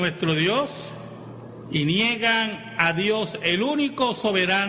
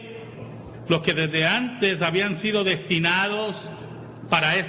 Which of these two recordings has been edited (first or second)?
second